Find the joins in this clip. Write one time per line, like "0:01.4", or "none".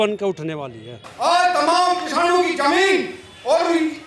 0:01.0